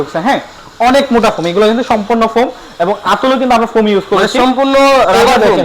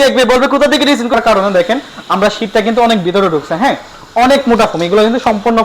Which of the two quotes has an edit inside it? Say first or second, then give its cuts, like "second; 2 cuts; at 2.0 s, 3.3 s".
second; 1 cut; at 1.1 s